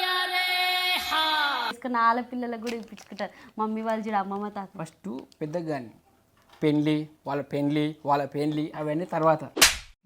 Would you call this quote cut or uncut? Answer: cut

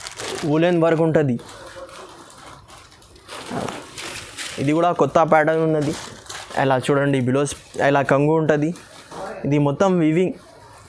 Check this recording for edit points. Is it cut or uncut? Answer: uncut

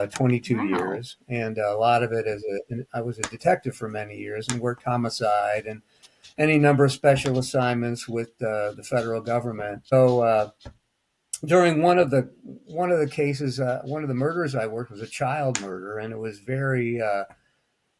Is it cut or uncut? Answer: cut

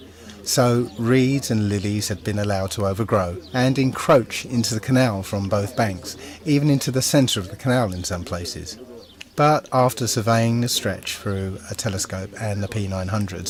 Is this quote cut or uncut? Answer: uncut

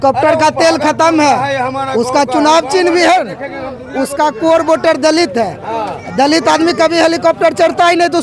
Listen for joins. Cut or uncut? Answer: uncut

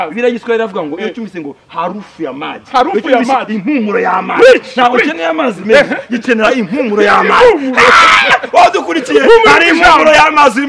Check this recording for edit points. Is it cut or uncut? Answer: uncut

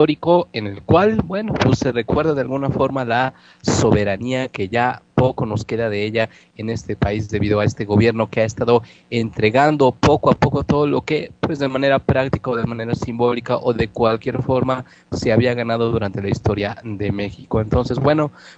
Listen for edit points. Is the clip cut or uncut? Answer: uncut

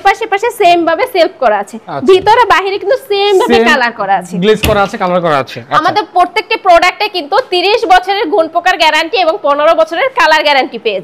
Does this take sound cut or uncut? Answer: uncut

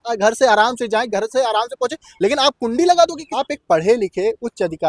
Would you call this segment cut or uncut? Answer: cut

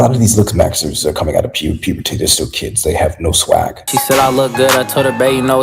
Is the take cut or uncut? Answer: cut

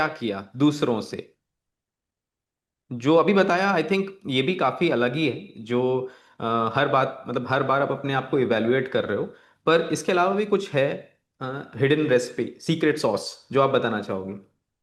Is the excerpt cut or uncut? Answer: uncut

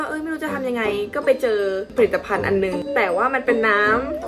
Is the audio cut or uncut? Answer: uncut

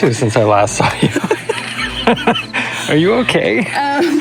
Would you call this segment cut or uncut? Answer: uncut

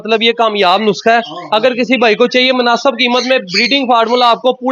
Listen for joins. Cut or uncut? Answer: uncut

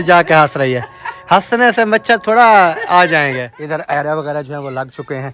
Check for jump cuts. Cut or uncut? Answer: cut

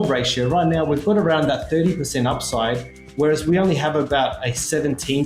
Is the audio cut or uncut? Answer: uncut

